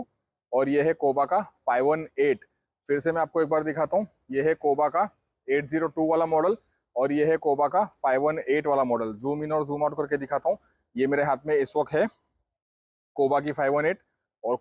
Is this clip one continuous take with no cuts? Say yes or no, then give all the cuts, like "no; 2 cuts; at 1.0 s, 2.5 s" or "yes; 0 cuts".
yes; 0 cuts